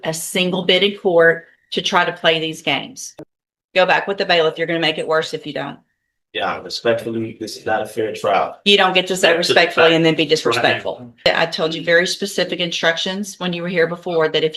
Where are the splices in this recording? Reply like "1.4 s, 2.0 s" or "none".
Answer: 3.0 s, 11.3 s

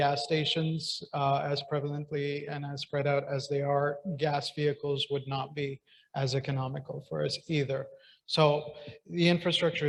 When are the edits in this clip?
none

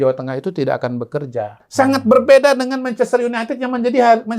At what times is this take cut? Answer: 1.6 s

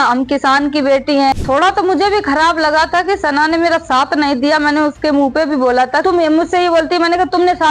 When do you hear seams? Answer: 1.4 s, 6.0 s

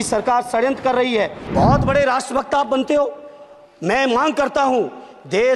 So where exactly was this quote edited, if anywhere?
1.4 s

